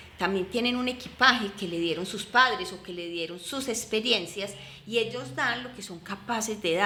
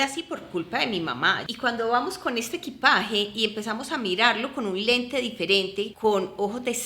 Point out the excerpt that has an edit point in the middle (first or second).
second